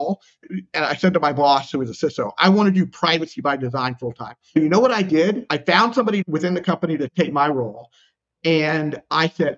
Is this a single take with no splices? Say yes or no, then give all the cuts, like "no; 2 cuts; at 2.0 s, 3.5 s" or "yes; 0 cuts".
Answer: no; 1 cut; at 4.5 s